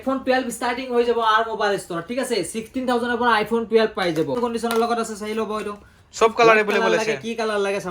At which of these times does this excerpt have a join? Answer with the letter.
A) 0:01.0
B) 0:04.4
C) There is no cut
B